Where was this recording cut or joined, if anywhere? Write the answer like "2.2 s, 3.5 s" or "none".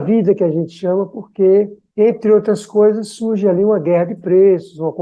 none